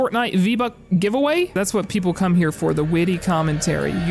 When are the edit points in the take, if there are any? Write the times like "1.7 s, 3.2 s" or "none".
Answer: 1.5 s